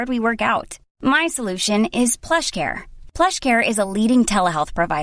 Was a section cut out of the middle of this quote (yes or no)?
no